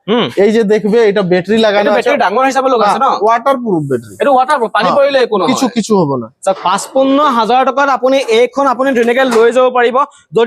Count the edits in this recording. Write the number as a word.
one